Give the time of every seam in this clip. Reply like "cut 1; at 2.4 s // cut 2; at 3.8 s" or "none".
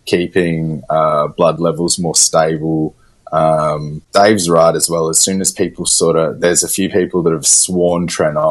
cut 1; at 3.9 s

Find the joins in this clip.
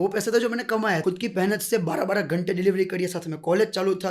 cut 1; at 1.0 s

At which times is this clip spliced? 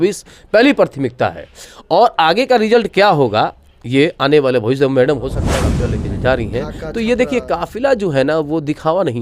cut 1; at 5.7 s

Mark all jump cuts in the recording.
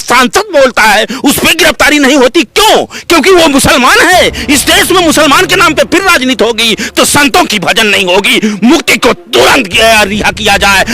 none

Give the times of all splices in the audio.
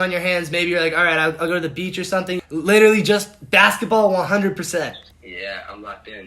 cut 1; at 2.4 s // cut 2; at 5.1 s

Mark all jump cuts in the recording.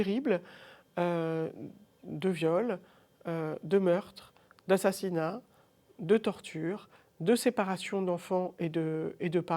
none

